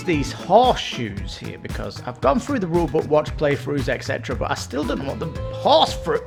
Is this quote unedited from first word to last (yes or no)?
yes